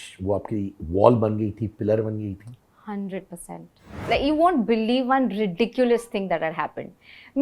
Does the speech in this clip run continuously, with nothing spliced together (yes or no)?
no